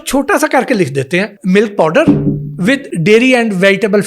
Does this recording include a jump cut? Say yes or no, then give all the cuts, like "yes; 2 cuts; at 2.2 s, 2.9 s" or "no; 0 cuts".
yes; 2 cuts; at 1.3 s, 2.9 s